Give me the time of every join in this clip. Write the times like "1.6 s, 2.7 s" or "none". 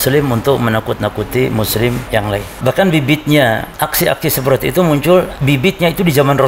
2.1 s, 3.7 s, 5.4 s